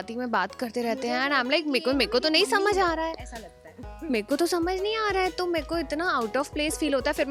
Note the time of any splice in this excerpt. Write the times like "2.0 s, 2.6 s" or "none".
none